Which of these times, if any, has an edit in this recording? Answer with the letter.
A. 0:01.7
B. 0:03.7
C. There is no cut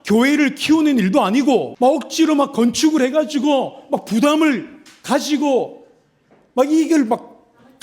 A